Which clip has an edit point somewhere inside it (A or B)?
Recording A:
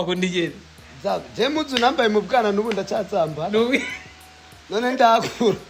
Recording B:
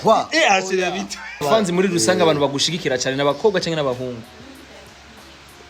B